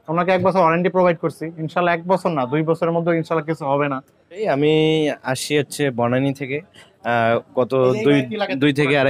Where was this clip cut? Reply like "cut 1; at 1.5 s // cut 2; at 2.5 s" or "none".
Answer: cut 1; at 4.4 s